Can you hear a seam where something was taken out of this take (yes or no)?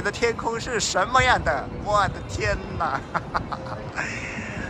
no